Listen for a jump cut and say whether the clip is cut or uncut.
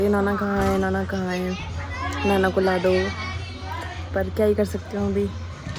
uncut